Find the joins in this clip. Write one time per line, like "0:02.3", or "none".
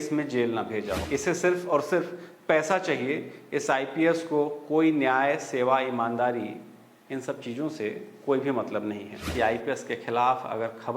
0:01.0
0:09.3